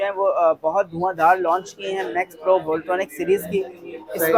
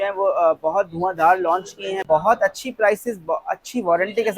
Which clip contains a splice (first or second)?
second